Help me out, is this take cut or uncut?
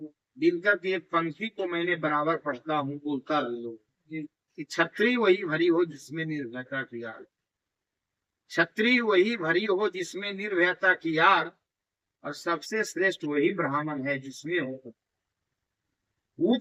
uncut